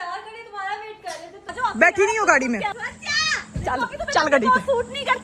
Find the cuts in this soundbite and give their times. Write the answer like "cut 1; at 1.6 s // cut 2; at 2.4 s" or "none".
cut 1; at 1.5 s // cut 2; at 2.8 s

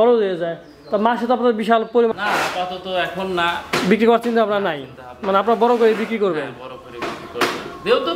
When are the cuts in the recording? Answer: cut 1; at 2.1 s

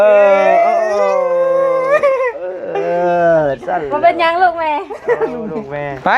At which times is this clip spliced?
none

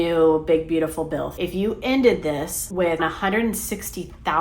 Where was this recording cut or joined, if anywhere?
cut 1; at 1.3 s // cut 2; at 3.0 s

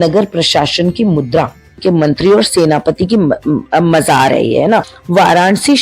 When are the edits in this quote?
cut 1; at 1.8 s // cut 2; at 5.0 s

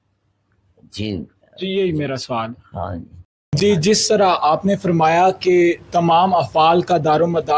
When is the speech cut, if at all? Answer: cut 1; at 3.4 s

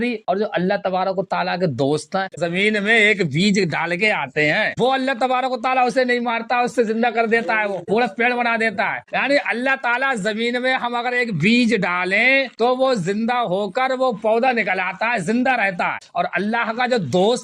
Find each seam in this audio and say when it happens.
cut 1; at 2.3 s // cut 2; at 4.7 s // cut 3; at 9.1 s // cut 4; at 16.0 s

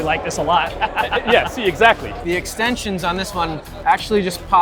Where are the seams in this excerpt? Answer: cut 1; at 2.1 s

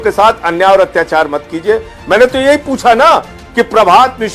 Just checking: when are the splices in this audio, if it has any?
none

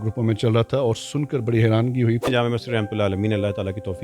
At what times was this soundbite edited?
cut 1; at 2.3 s

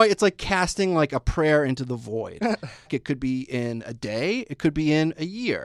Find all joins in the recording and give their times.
cut 1; at 2.9 s

